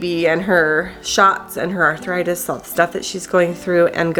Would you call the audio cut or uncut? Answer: uncut